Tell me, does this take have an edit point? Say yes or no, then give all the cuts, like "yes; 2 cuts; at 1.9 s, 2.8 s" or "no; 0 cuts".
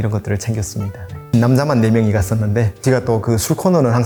no; 0 cuts